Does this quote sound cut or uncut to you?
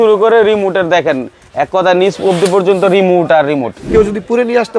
cut